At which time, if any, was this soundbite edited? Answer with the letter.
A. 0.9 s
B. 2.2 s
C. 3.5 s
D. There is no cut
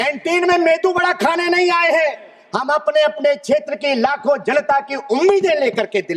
D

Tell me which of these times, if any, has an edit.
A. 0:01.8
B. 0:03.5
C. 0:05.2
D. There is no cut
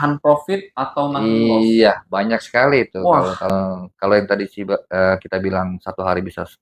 B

